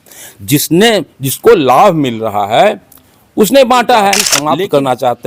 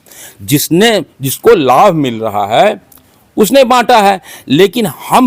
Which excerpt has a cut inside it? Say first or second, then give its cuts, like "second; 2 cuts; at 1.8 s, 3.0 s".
first; 1 cut; at 4.3 s